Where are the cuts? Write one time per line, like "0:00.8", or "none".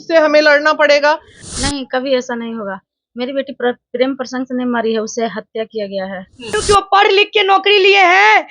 0:01.4
0:06.6